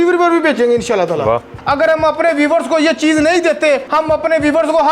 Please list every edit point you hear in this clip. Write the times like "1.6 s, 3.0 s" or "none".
1.5 s, 3.9 s